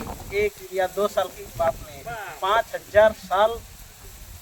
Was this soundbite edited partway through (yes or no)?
no